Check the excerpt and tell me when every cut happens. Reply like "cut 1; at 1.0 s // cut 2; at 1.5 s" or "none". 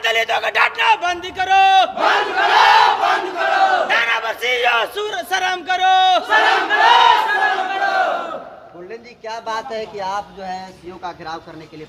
none